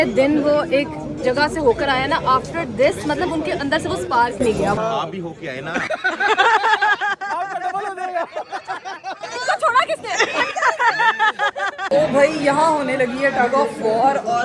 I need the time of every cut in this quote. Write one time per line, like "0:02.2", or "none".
0:04.8
0:11.9

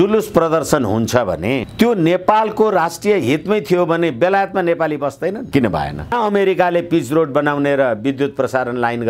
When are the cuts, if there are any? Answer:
0:06.1

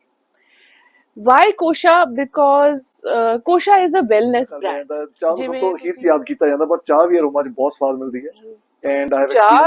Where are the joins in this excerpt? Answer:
0:05.1

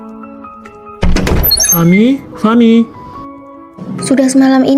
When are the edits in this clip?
0:01.0

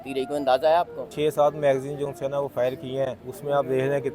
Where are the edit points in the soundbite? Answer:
0:01.1
0:03.3

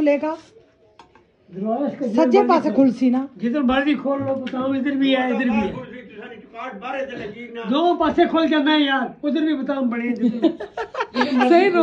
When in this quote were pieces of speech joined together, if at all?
none

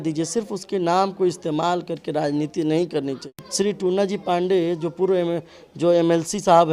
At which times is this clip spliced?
0:03.4

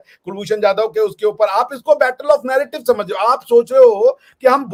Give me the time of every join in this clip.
none

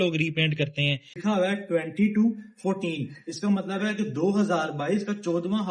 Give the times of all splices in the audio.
0:01.2

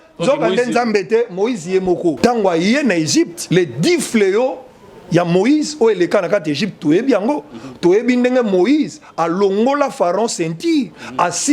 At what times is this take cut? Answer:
0:02.2
0:03.4

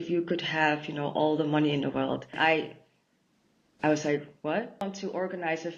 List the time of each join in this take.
0:02.3
0:04.8

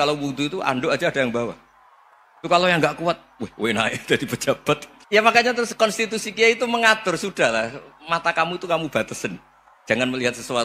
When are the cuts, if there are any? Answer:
0:04.9

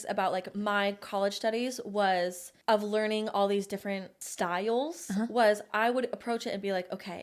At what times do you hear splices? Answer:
0:02.5
0:04.2

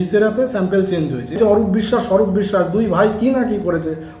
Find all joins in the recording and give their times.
0:01.4

